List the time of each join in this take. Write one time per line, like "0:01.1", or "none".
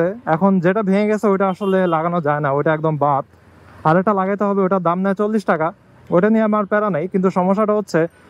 none

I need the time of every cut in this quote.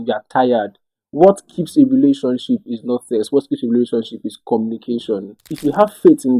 0:05.4

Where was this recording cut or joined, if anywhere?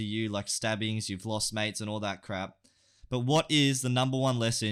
none

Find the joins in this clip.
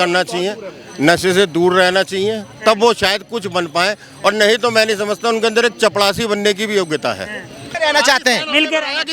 0:07.6

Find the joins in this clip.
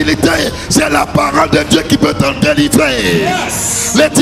none

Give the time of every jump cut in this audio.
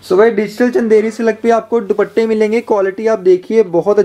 none

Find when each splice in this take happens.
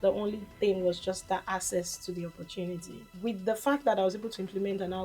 0:03.1

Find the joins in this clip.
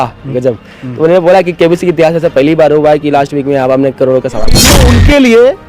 0:04.7

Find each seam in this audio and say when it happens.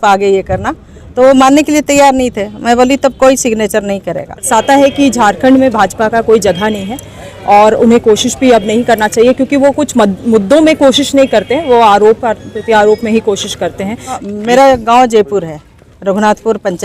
0:04.5
0:14.2

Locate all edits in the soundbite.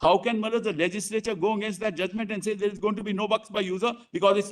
none

